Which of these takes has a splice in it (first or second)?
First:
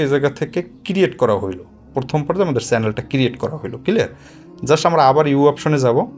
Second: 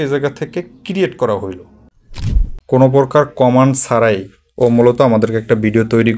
second